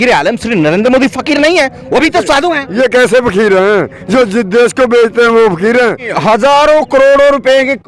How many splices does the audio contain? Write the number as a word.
one